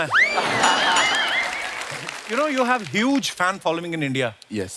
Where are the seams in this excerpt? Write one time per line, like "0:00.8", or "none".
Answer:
0:02.1